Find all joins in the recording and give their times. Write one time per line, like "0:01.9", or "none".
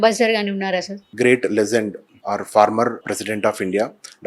0:01.0
0:02.1
0:03.0